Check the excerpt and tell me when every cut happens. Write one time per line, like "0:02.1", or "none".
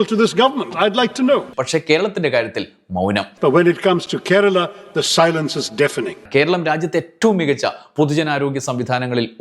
0:01.5
0:03.3
0:06.2